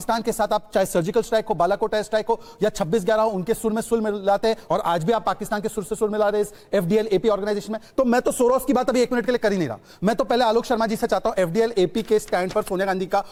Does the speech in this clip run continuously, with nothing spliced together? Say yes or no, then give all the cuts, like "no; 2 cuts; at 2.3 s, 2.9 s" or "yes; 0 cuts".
yes; 0 cuts